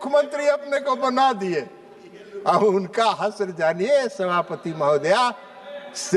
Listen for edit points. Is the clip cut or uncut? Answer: uncut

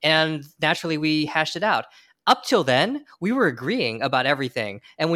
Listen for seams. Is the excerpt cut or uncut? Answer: uncut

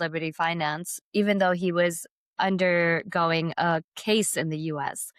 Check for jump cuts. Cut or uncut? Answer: uncut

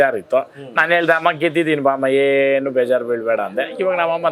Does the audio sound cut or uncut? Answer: uncut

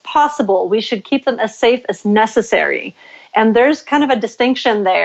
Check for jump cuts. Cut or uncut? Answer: uncut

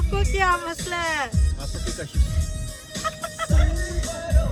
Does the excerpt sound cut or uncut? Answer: uncut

